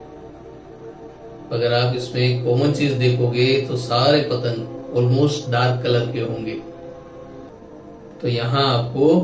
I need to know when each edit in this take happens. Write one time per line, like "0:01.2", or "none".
0:07.5